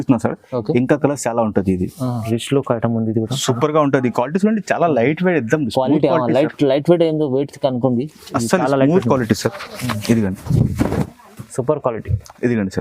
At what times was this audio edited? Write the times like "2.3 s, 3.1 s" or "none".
2.2 s